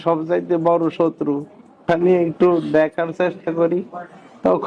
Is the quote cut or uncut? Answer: cut